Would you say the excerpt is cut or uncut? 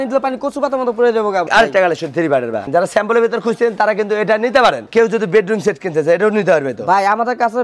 cut